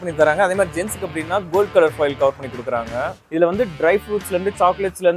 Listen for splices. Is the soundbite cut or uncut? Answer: cut